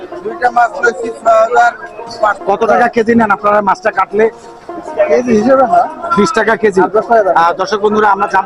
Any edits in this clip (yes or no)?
yes